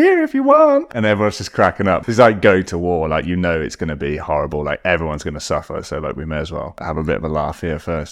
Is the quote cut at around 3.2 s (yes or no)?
no